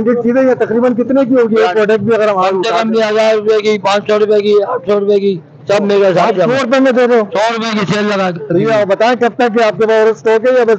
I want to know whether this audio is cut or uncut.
uncut